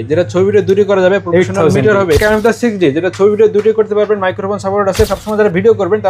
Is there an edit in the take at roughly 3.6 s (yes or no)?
no